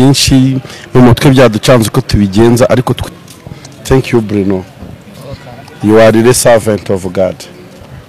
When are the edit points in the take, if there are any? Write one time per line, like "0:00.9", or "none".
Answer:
0:03.0